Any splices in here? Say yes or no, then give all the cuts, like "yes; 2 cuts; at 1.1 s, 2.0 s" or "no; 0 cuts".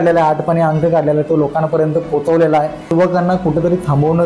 yes; 1 cut; at 2.9 s